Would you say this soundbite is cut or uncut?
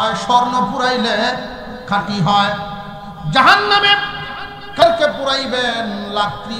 cut